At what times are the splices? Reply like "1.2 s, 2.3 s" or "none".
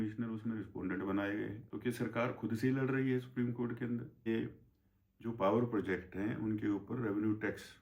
1.6 s, 4.3 s